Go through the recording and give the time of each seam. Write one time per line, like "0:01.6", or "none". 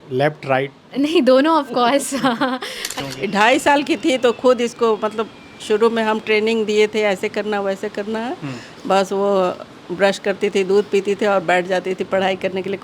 0:03.0